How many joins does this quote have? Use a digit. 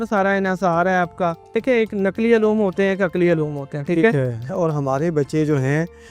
2